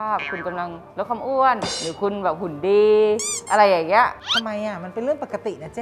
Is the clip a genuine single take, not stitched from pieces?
yes; 0 cuts

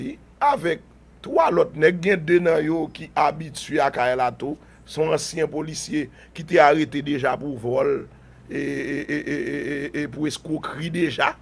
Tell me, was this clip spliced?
yes; 1 cut; at 1.2 s

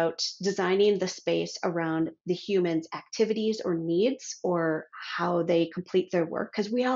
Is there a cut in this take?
no; 0 cuts

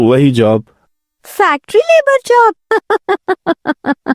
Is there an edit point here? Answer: yes; 1 cut; at 2.6 s

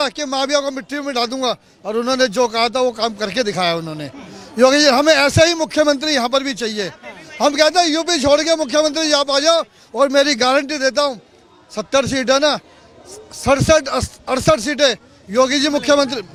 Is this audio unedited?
yes; 0 cuts

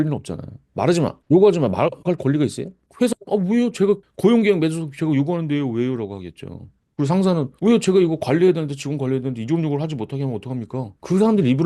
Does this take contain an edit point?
no; 0 cuts

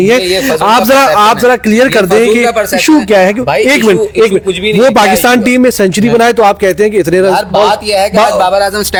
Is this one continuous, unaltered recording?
yes; 0 cuts

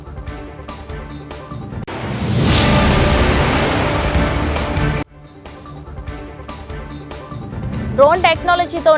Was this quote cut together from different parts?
no; 0 cuts

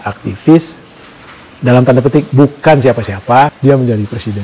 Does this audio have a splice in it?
yes; 1 cut; at 3.5 s

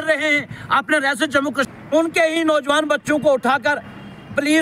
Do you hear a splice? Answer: yes; 1 cut; at 1.6 s

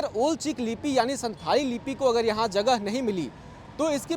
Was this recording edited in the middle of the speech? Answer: no; 0 cuts

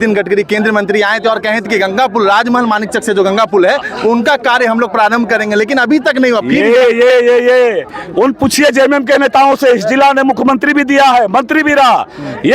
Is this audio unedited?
yes; 0 cuts

